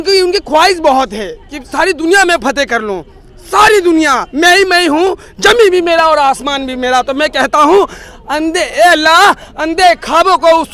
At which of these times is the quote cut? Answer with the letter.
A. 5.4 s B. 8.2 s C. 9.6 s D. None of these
D